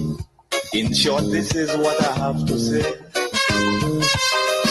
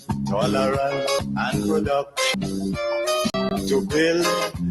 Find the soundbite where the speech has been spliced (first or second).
second